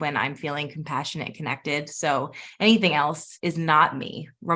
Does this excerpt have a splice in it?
yes; 1 cut; at 3.3 s

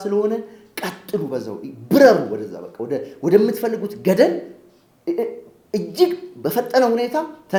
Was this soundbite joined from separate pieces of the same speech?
no; 0 cuts

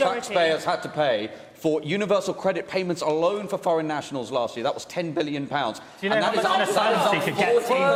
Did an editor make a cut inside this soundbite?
no; 0 cuts

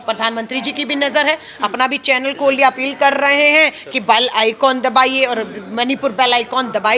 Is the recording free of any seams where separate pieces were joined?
yes; 0 cuts

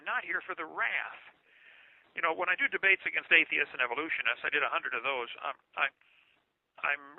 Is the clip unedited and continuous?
no; 1 cut; at 2.5 s

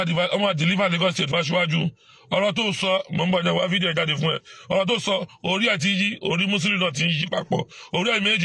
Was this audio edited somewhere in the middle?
no; 0 cuts

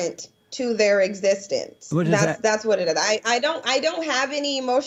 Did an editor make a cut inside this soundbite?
no; 0 cuts

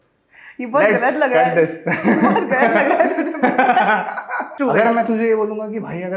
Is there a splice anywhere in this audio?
yes; 1 cut; at 4.4 s

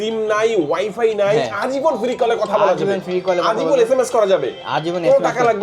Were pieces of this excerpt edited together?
no; 0 cuts

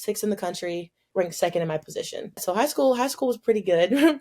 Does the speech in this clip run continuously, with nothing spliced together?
no; 2 cuts; at 1.0 s, 2.4 s

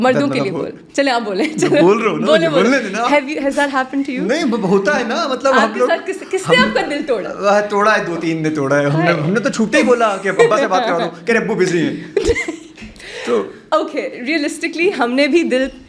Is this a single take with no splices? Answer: yes; 0 cuts

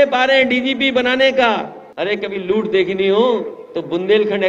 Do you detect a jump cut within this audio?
yes; 1 cut; at 1.8 s

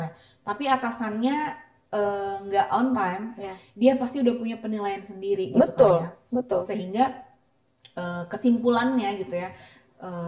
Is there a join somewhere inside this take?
no; 0 cuts

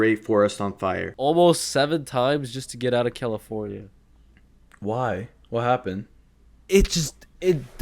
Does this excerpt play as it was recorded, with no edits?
no; 1 cut; at 1.1 s

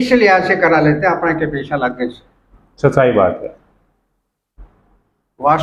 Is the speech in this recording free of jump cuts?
yes; 0 cuts

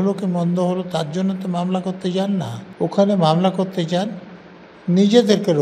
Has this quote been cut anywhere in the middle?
yes; 1 cut; at 2.6 s

